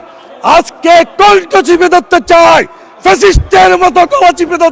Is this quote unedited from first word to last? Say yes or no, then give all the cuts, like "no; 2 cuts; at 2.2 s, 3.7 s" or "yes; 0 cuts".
yes; 0 cuts